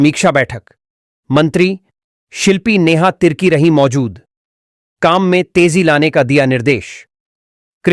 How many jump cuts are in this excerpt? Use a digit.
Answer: 0